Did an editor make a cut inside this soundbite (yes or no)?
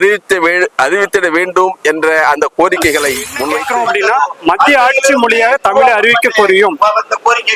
yes